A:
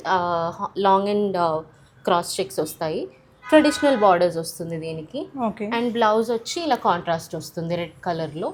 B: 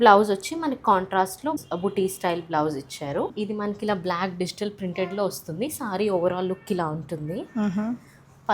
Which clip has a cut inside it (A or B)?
B